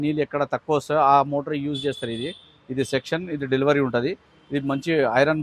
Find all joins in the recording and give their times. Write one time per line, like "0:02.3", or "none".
none